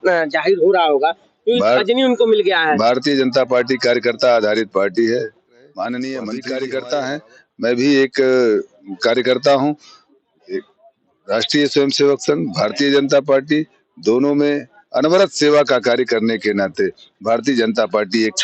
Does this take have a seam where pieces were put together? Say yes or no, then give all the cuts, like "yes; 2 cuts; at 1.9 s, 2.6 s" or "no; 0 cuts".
yes; 1 cut; at 6.4 s